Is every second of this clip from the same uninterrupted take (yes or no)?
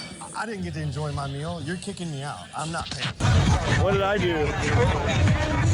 no